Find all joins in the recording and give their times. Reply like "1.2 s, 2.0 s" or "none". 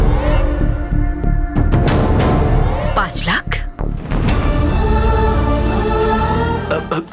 none